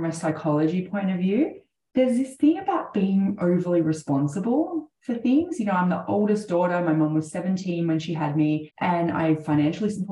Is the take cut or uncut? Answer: cut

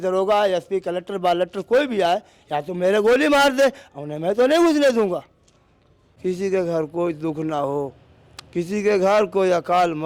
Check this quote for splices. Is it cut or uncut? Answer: cut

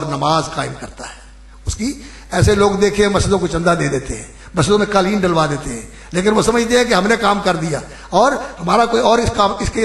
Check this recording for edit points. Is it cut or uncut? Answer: uncut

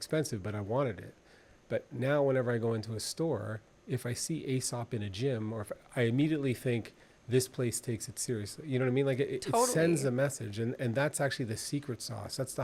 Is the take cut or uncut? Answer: uncut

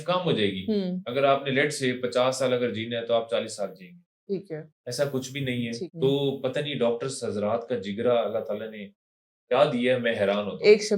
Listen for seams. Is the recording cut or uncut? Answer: cut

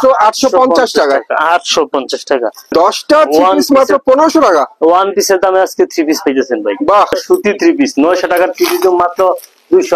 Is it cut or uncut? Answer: cut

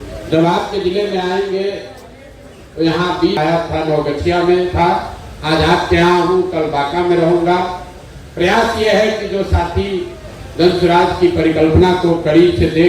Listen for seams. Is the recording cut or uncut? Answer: cut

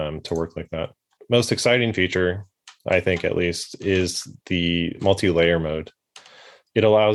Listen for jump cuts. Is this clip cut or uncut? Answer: uncut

